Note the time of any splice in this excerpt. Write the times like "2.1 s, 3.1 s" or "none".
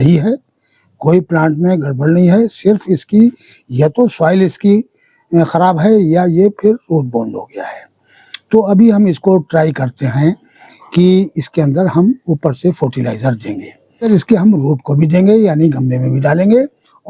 14.0 s